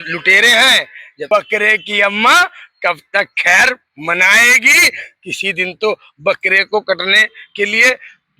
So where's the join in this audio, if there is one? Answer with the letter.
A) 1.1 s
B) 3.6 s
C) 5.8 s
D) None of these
A